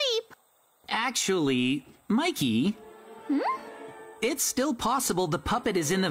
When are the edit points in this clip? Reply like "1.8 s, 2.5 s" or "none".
none